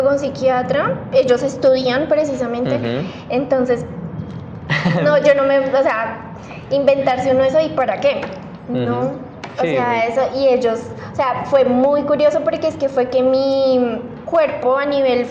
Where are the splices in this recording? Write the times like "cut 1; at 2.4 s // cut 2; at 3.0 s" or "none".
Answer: none